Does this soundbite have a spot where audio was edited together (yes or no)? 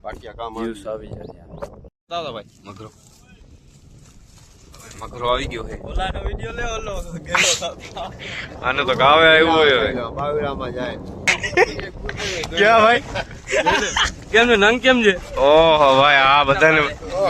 yes